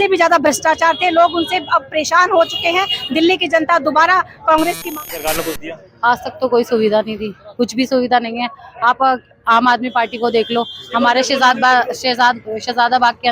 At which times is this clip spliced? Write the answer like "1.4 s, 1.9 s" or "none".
4.8 s